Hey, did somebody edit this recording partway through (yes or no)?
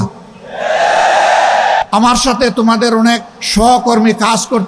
yes